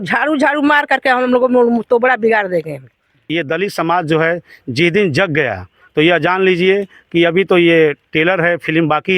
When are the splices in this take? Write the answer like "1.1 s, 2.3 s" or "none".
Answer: 3.2 s

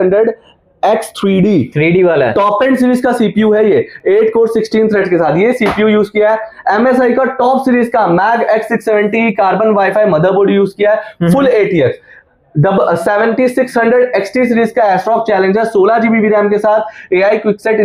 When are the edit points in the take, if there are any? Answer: none

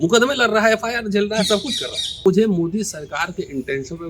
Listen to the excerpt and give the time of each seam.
2.2 s

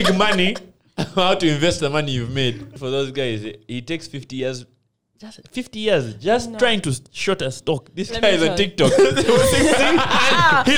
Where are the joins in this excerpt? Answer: 2.7 s

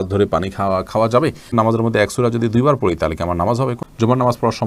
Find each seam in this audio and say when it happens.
1.5 s, 3.8 s

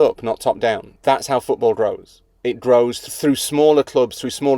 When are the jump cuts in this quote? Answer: 3.0 s

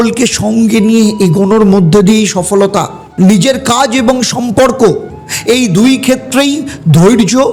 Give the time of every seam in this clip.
3.0 s

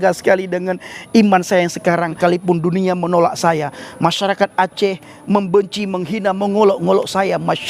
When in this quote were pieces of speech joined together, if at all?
2.1 s

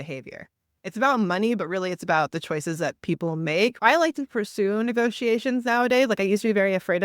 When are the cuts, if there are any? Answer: 3.8 s

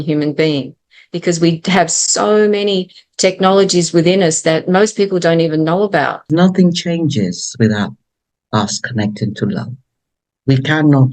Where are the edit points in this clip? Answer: 6.3 s

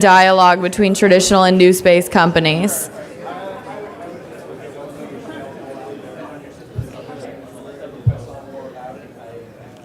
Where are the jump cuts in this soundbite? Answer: none

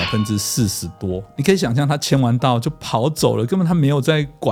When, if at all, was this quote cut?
none

